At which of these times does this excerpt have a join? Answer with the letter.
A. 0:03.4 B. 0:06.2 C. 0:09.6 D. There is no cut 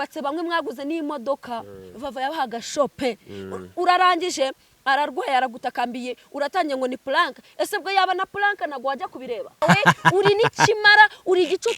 C